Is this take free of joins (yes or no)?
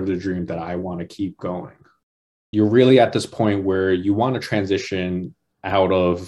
no